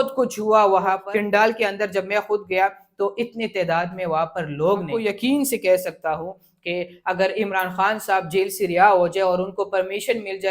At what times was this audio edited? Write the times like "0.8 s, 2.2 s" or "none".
1.0 s, 5.0 s